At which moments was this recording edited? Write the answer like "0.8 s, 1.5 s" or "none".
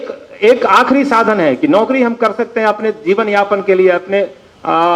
none